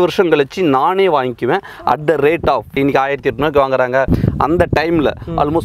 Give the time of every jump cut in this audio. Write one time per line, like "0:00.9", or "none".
0:02.7
0:04.1

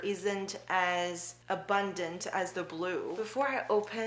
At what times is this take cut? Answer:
0:01.3
0:03.1

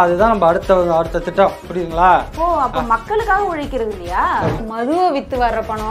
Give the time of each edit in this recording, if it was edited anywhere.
0:04.6

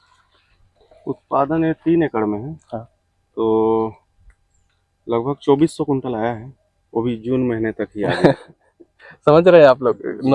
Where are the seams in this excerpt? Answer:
none

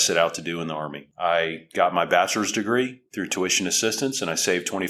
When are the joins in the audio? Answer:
none

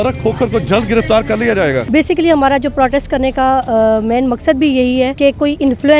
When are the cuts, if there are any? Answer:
0:01.9
0:05.1

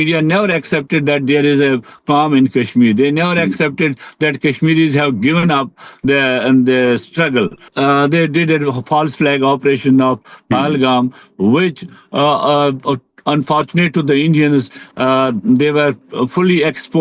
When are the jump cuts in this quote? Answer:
0:07.6

